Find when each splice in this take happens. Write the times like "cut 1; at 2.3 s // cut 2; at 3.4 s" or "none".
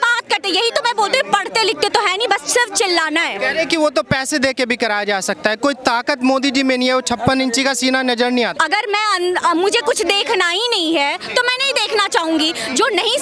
cut 1; at 8.5 s

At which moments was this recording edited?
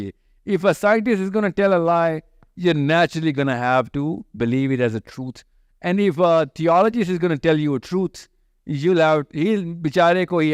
none

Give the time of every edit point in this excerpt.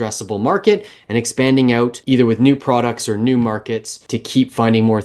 cut 1; at 2.0 s // cut 2; at 4.0 s

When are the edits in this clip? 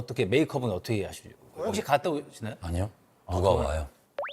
cut 1; at 1.6 s

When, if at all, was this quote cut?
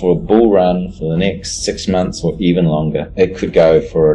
none

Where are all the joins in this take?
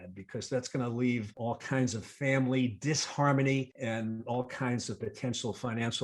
cut 1; at 1.4 s // cut 2; at 3.7 s

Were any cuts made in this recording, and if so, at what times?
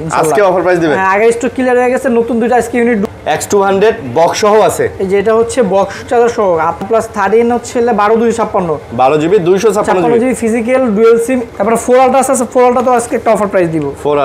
cut 1; at 3.1 s // cut 2; at 6.8 s // cut 3; at 11.5 s

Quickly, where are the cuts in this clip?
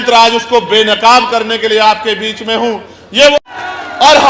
cut 1; at 3.4 s

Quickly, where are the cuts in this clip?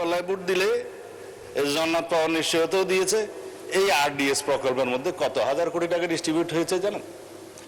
none

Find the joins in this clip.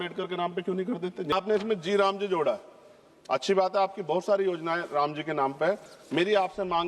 cut 1; at 1.3 s

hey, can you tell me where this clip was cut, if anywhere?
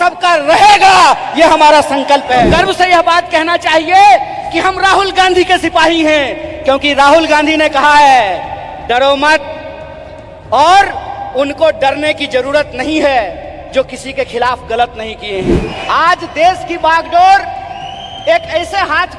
cut 1; at 2.5 s // cut 2; at 15.7 s

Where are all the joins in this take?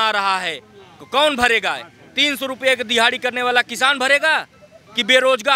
none

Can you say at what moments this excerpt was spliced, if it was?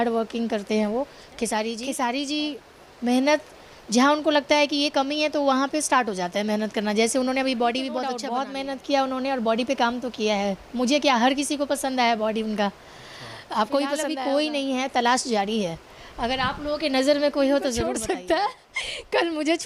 cut 1; at 1.8 s // cut 2; at 8.2 s // cut 3; at 14.1 s // cut 4; at 17.9 s

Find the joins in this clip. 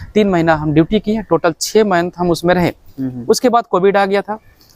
none

